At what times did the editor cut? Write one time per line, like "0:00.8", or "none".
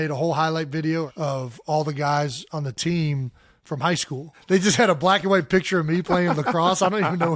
0:01.1
0:04.3